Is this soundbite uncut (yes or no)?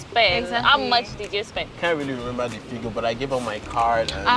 no